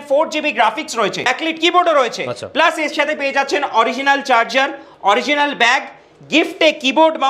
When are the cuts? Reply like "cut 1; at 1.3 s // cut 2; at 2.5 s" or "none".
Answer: cut 1; at 1.3 s